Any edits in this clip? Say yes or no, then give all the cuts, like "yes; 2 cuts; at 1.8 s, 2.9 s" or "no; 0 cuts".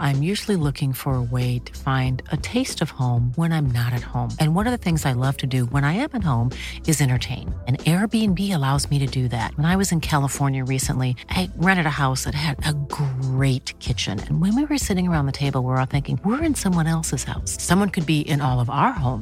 no; 0 cuts